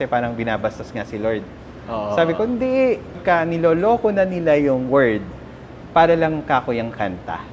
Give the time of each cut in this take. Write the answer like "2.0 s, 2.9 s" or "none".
3.2 s